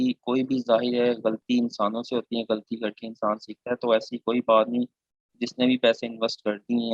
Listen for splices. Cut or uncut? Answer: uncut